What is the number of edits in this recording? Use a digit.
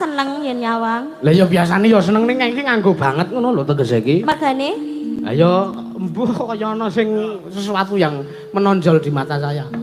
0